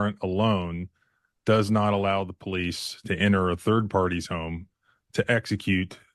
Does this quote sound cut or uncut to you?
uncut